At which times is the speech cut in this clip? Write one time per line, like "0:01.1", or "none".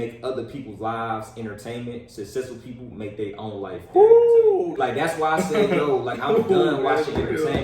0:04.7